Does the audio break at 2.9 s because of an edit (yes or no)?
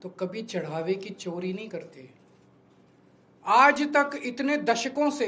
yes